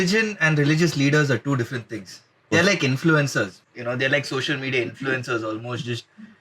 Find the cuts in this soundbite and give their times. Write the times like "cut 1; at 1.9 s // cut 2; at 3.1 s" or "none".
cut 1; at 2.5 s // cut 2; at 3.6 s